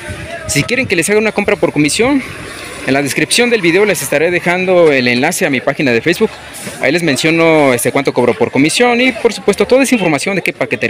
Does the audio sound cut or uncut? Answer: uncut